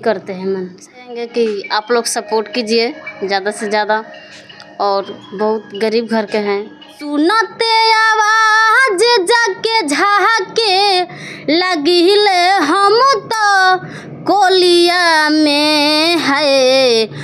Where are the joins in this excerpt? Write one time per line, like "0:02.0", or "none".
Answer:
0:01.2
0:07.0